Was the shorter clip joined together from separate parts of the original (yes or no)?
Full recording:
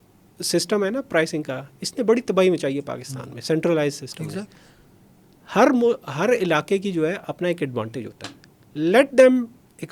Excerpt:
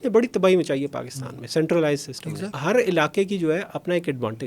yes